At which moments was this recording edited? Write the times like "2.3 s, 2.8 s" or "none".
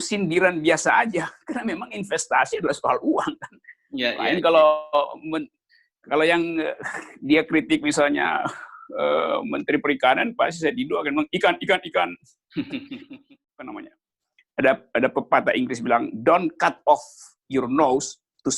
13.0 s